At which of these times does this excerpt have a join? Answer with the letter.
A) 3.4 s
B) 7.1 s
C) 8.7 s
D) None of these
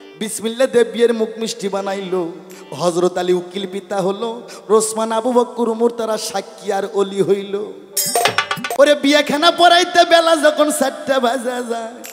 C